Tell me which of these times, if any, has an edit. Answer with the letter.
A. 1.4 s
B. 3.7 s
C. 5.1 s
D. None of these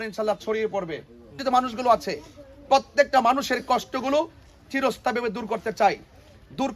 A